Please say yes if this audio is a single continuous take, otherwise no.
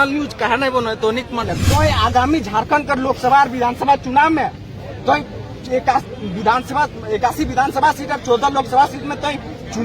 no